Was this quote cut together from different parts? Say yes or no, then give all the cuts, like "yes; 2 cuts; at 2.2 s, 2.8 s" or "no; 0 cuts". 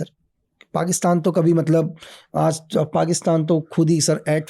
no; 0 cuts